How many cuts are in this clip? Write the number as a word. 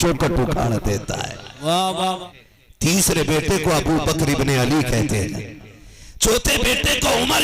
one